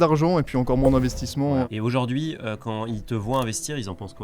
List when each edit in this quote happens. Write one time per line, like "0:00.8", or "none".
0:01.7